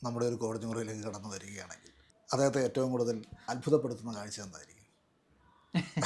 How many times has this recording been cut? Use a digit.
1